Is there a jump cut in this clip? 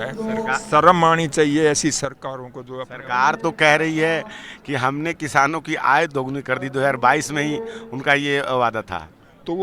no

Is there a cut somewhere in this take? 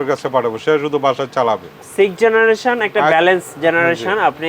yes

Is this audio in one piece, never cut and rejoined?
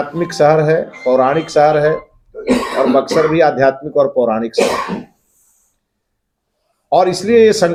yes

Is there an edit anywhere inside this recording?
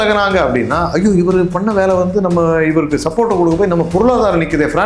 no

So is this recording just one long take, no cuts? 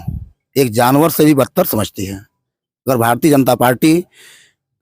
yes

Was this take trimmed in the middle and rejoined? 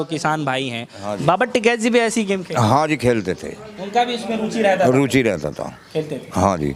no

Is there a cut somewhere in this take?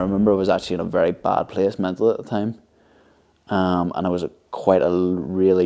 no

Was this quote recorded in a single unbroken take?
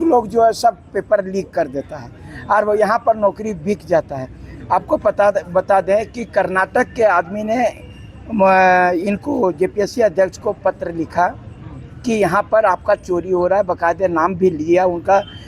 yes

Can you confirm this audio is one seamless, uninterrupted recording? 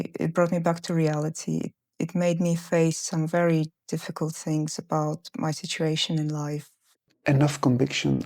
no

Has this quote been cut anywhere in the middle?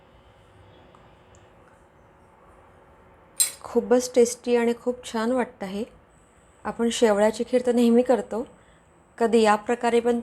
no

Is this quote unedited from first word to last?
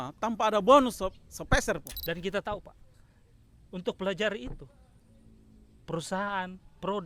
no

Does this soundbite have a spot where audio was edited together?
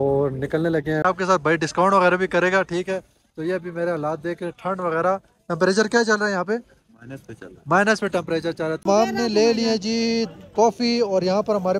yes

